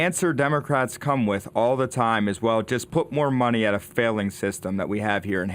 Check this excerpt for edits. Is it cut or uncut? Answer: cut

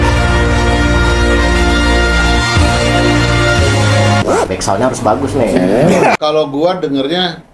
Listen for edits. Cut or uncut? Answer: cut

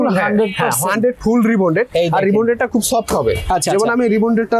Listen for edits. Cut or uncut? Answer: uncut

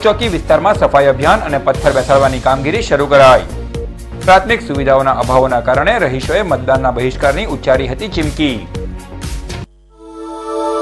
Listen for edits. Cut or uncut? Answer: cut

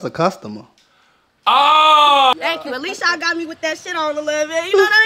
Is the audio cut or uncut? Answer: cut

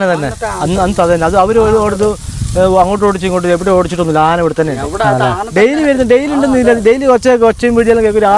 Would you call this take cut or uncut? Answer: uncut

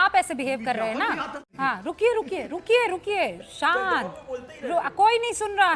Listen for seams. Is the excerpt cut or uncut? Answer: cut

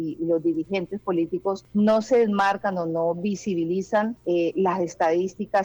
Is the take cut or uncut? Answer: cut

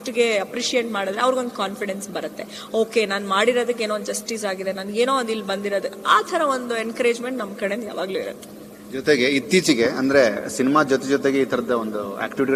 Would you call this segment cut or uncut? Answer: uncut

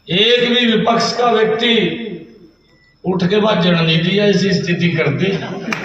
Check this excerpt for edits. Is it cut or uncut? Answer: uncut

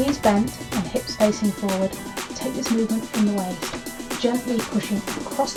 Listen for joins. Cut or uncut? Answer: uncut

